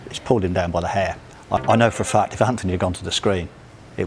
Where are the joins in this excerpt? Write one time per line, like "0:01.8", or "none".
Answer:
0:01.6